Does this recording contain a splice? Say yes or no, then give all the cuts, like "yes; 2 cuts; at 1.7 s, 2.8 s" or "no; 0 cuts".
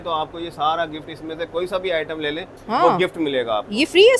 no; 0 cuts